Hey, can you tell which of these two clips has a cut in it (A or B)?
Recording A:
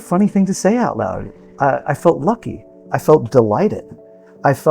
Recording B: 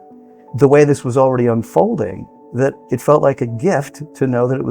A